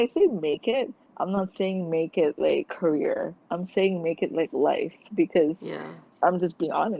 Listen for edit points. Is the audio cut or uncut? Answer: cut